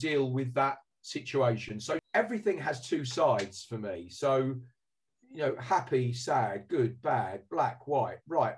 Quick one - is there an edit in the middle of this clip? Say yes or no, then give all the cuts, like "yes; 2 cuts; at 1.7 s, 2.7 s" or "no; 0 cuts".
yes; 1 cut; at 2.0 s